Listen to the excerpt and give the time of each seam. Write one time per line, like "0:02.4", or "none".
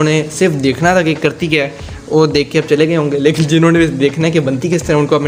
none